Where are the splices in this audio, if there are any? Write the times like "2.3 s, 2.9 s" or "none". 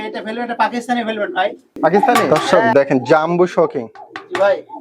2.3 s